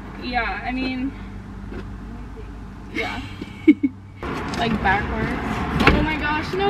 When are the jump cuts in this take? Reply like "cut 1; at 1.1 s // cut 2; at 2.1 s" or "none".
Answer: none